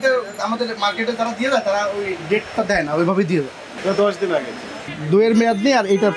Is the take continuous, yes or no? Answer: no